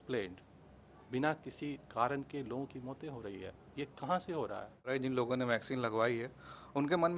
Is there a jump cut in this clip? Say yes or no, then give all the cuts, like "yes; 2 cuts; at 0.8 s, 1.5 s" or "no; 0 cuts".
yes; 1 cut; at 4.9 s